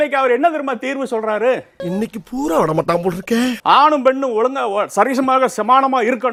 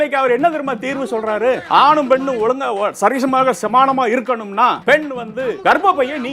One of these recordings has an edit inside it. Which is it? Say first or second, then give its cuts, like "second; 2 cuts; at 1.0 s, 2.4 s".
second; 2 cuts; at 1.6 s, 5.0 s